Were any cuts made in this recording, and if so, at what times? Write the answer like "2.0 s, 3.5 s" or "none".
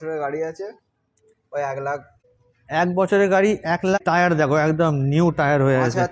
2.2 s, 4.0 s